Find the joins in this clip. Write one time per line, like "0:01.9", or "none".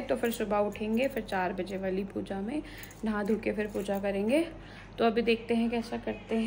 none